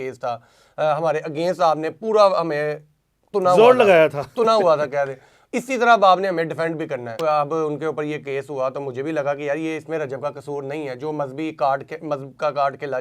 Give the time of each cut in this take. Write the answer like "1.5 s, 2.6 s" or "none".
7.2 s